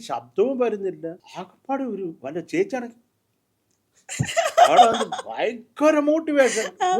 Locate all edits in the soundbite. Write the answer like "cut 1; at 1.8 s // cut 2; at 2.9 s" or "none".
cut 1; at 1.2 s